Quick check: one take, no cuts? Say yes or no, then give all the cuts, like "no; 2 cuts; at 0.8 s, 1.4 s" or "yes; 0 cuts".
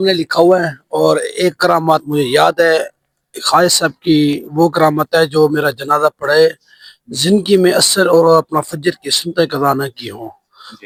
yes; 0 cuts